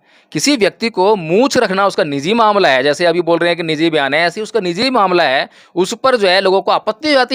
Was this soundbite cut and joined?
no; 0 cuts

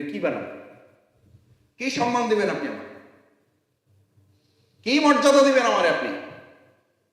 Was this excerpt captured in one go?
yes; 0 cuts

